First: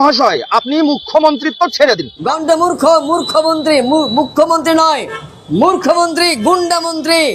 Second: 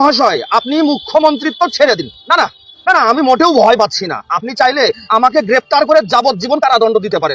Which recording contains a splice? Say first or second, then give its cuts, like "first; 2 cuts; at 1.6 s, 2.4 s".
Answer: second; 1 cut; at 2.1 s